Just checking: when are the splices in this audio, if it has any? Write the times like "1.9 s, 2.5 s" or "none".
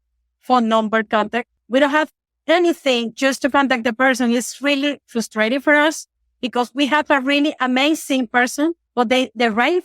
1.5 s, 8.8 s